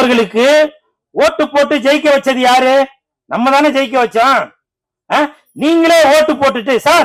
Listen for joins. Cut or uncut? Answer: uncut